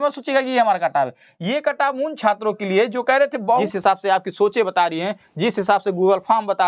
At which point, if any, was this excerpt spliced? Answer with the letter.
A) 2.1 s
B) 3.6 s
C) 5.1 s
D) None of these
B